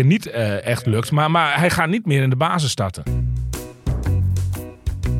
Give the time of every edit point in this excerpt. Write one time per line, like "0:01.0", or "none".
0:03.0

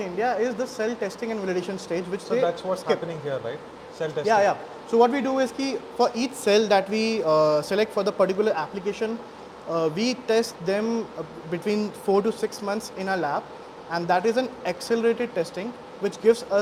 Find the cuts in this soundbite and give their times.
none

